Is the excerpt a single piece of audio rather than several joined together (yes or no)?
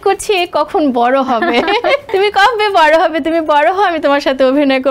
no